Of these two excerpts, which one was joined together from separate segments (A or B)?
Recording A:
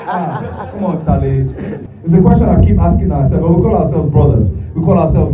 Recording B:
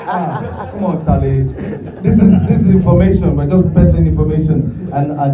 A